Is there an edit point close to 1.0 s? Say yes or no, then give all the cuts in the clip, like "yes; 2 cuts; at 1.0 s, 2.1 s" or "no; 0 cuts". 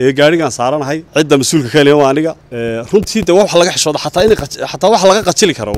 yes; 2 cuts; at 1.0 s, 2.5 s